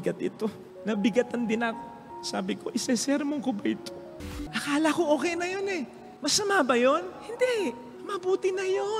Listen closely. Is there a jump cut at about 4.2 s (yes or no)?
yes